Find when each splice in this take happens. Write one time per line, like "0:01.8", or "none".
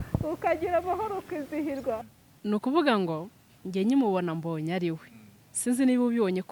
0:02.1